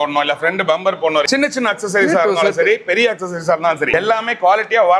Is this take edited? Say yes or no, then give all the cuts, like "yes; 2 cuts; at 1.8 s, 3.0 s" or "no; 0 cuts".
yes; 2 cuts; at 1.3 s, 3.9 s